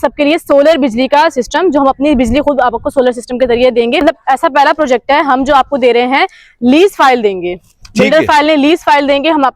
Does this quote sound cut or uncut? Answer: cut